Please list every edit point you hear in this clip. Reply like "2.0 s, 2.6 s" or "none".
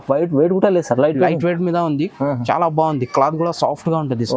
none